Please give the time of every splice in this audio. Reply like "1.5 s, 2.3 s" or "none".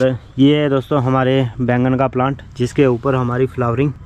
none